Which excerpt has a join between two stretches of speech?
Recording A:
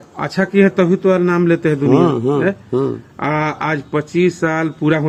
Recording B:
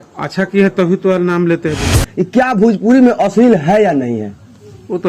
B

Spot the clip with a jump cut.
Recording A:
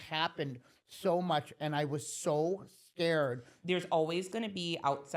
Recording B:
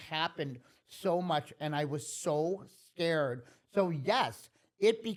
A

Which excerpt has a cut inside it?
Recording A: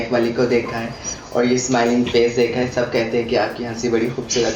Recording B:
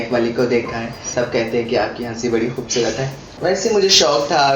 B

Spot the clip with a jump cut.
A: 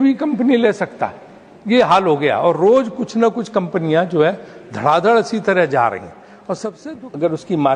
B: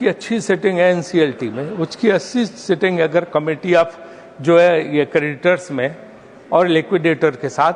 A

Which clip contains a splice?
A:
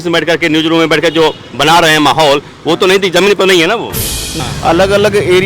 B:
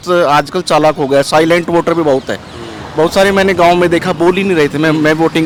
A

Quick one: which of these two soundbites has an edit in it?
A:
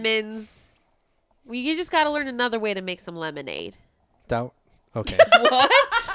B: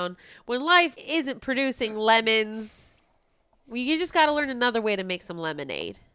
B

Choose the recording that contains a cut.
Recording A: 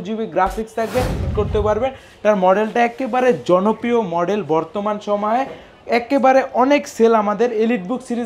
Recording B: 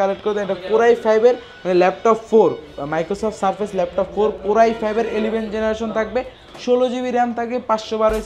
A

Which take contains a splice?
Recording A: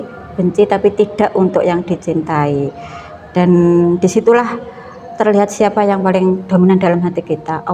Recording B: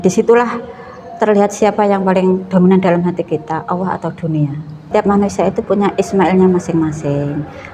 B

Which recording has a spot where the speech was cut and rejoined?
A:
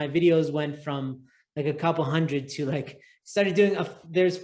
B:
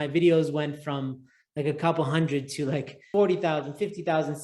B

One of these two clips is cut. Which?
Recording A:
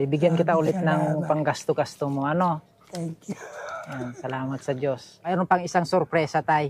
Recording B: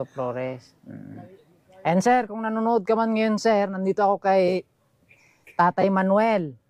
A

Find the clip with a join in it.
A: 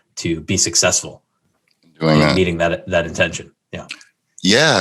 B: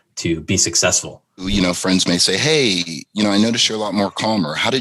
B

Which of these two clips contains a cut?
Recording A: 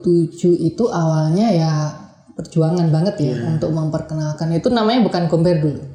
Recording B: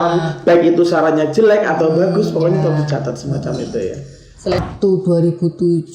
B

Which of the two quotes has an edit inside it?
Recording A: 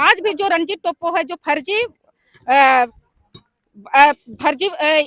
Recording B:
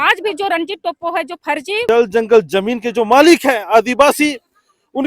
B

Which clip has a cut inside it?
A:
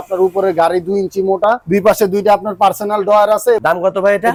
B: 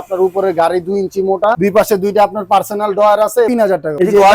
B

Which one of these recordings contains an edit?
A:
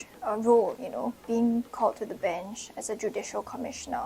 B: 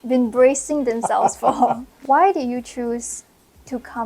B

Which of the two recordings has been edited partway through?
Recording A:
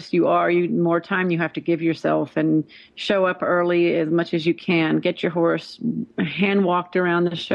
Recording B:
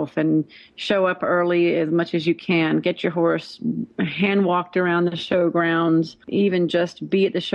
B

